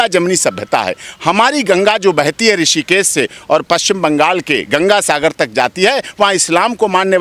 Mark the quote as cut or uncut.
uncut